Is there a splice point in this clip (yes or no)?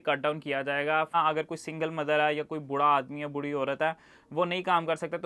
yes